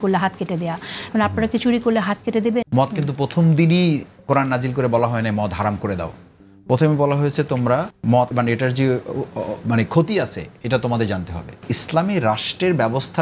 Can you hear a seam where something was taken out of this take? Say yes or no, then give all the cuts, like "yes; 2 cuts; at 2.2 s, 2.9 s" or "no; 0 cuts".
yes; 3 cuts; at 2.6 s, 8.3 s, 11.7 s